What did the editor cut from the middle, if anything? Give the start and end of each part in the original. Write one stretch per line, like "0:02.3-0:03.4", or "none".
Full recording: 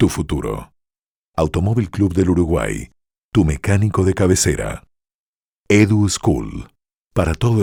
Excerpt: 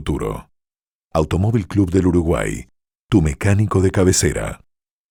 none